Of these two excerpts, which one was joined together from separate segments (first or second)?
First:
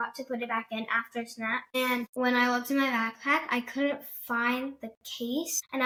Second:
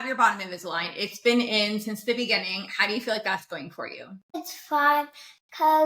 second